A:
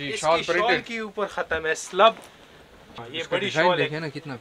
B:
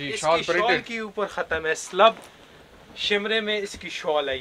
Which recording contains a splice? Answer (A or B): A